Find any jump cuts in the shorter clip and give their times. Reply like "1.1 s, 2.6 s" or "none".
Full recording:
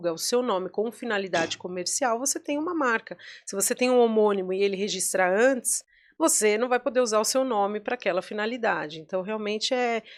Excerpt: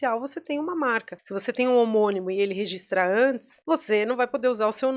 1.2 s, 3.5 s